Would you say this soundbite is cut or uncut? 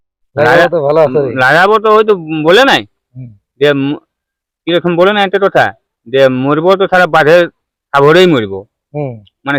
uncut